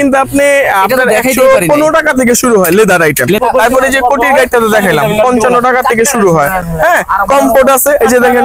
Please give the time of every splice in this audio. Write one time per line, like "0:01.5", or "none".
0:03.4